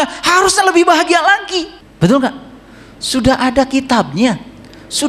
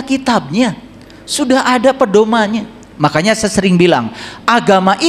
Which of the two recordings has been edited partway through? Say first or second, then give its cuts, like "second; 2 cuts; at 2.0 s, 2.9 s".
first; 1 cut; at 1.8 s